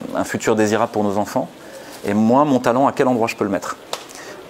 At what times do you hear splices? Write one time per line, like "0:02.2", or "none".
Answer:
none

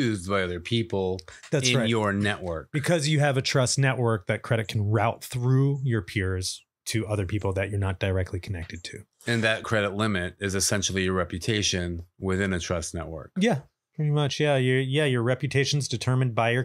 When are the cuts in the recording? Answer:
0:09.6

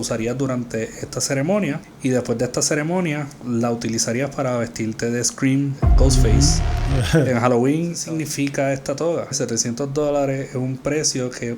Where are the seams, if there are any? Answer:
0:01.9
0:03.4
0:05.8
0:08.0
0:09.4

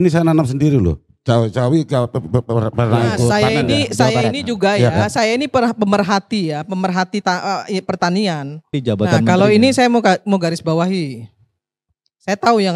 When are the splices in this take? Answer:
0:08.8

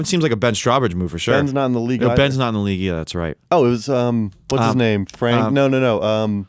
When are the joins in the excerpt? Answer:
0:03.4
0:04.4

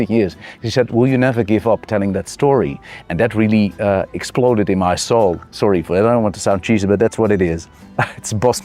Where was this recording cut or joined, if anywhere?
none

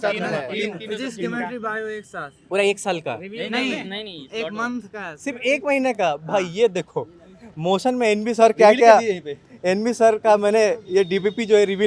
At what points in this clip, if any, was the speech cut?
none

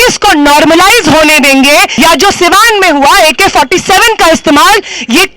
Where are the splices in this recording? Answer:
0:01.9

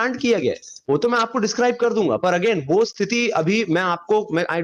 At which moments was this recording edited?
none

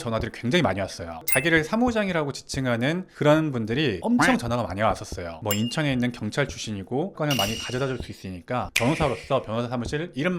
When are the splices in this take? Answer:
0:01.2

